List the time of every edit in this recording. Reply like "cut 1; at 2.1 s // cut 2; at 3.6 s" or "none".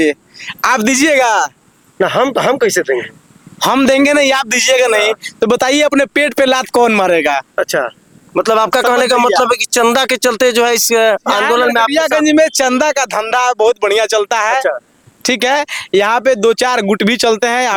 none